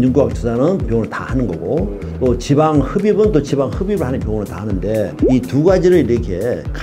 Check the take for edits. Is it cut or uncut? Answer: uncut